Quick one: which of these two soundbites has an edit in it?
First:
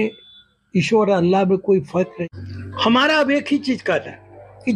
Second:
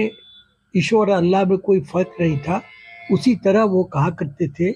first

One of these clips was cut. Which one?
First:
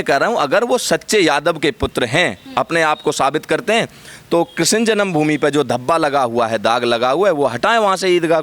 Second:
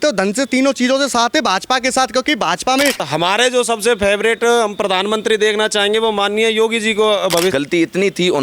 second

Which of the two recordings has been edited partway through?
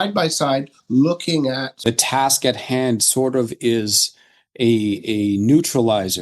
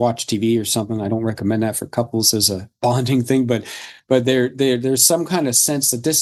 first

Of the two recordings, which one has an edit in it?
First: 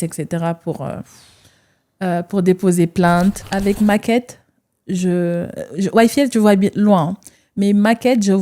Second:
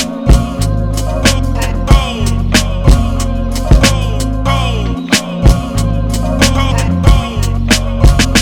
first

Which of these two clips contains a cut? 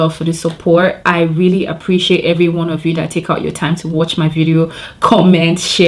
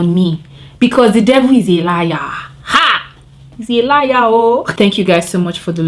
second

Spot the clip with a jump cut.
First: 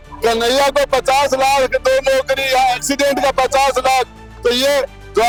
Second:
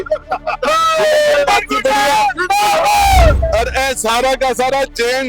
second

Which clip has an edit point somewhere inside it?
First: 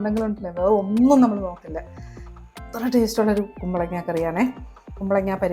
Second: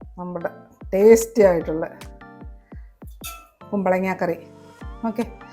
second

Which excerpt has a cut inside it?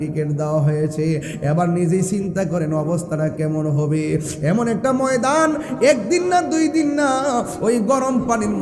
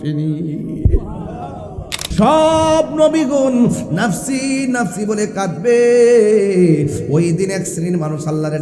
second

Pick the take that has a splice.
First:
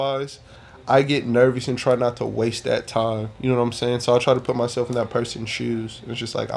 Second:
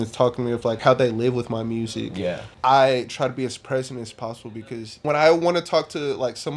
second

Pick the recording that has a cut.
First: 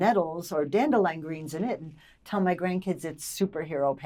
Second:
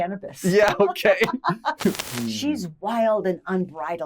second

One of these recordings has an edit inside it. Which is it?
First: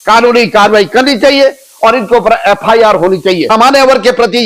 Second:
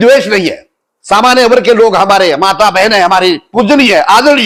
first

